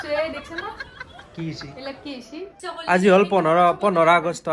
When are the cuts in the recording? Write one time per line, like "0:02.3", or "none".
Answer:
0:02.6